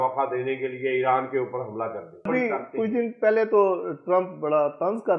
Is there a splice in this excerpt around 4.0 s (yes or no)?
no